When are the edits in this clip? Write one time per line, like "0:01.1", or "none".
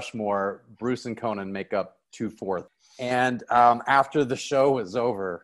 0:02.7